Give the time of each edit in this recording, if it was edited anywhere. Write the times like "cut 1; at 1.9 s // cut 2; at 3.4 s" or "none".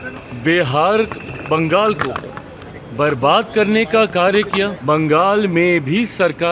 cut 1; at 4.8 s